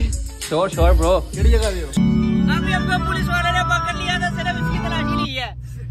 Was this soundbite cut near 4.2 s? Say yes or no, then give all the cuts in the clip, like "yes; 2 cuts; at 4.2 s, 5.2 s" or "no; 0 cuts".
no; 1 cut; at 2.0 s